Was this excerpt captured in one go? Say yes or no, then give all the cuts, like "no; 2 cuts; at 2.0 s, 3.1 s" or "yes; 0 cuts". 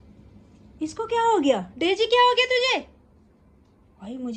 yes; 0 cuts